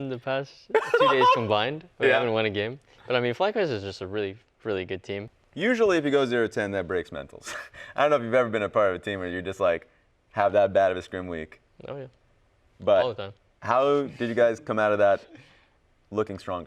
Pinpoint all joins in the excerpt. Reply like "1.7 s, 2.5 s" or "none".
5.4 s